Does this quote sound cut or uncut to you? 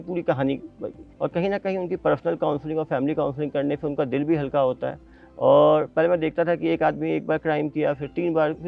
uncut